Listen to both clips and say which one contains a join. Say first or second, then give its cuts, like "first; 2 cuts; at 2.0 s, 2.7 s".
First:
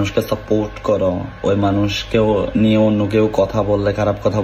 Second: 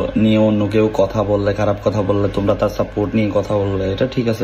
first; 1 cut; at 1.3 s